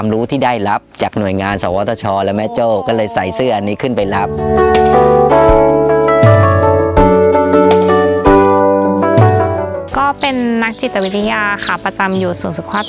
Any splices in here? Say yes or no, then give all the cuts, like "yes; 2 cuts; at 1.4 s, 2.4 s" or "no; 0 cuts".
no; 0 cuts